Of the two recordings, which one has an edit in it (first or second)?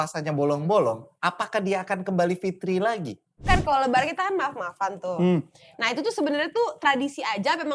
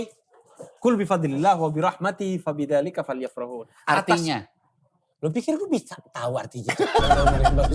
first